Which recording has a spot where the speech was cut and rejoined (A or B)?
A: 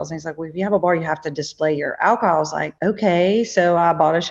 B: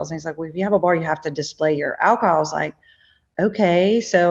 A